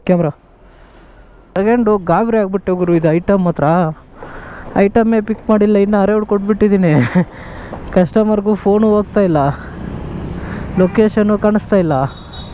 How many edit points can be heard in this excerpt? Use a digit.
1